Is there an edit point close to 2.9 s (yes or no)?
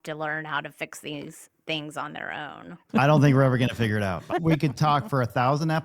yes